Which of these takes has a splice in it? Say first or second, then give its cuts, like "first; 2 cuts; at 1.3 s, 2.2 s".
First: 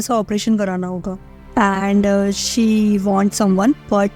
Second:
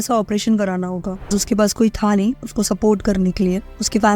second; 1 cut; at 1.3 s